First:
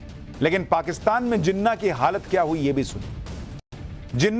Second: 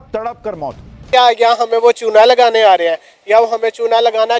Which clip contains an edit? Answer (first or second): second